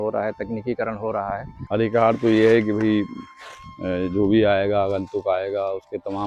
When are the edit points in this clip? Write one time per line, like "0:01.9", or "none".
0:01.5